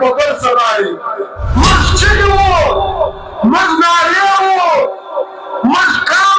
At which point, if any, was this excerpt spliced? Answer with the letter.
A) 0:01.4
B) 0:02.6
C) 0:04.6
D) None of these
A